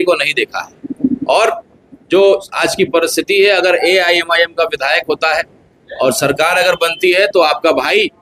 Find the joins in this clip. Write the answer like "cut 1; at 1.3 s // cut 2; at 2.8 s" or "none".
none